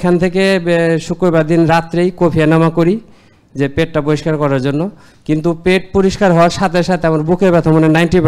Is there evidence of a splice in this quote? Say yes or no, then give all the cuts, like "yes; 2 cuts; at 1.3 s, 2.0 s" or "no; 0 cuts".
no; 0 cuts